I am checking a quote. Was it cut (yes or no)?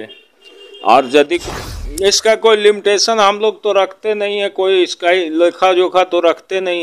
yes